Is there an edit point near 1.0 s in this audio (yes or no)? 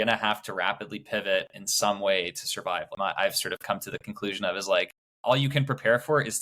no